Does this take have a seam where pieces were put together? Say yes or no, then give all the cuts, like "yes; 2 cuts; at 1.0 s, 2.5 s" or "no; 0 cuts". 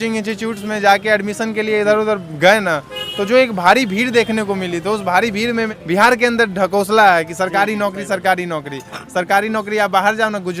yes; 1 cut; at 5.7 s